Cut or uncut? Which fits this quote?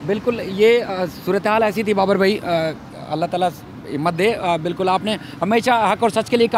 uncut